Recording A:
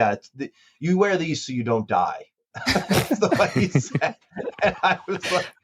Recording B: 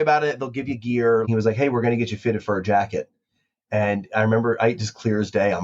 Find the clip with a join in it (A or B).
B